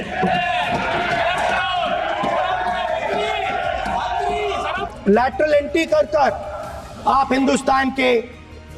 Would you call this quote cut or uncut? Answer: cut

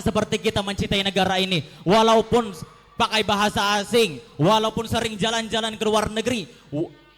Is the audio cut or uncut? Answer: uncut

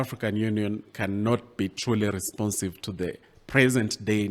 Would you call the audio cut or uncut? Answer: uncut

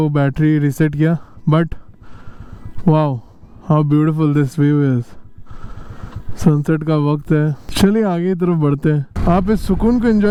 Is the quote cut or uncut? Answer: uncut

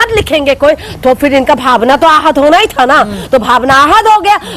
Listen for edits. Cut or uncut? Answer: uncut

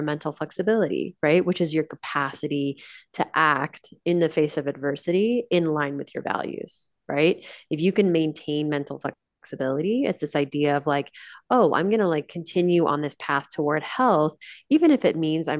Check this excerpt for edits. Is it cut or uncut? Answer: uncut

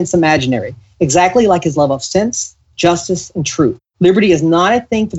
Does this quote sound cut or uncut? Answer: uncut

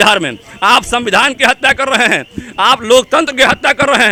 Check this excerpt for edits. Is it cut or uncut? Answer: uncut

